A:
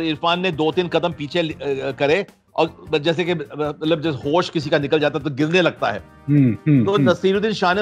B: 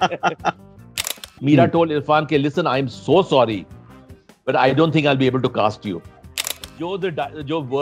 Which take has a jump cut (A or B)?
B